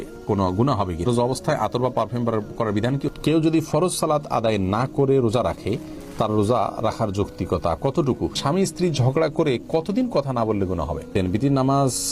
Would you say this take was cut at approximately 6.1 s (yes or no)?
no